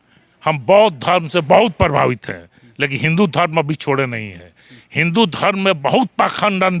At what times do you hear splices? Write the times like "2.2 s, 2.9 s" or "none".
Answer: none